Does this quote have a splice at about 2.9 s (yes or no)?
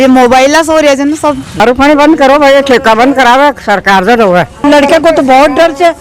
no